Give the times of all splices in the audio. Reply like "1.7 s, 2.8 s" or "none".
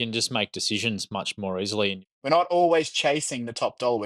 2.0 s